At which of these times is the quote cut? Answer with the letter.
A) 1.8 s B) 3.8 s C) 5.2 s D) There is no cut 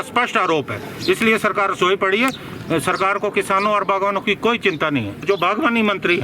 C